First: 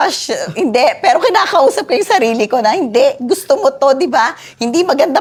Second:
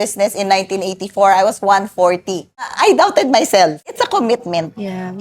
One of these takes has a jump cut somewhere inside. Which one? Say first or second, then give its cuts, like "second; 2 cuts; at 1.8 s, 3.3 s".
second; 2 cuts; at 2.7 s, 3.9 s